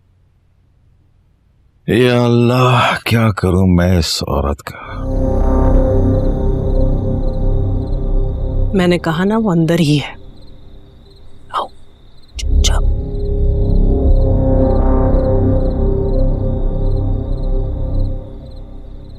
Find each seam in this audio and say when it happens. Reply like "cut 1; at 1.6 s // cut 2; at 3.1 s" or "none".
cut 1; at 5.1 s